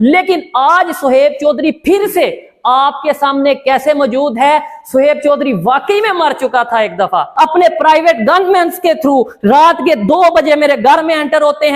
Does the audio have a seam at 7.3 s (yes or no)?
yes